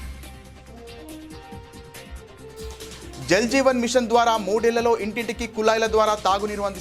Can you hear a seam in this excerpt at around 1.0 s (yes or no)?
yes